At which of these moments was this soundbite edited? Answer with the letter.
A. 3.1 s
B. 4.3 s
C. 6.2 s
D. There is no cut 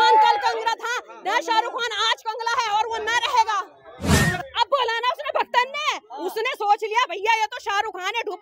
B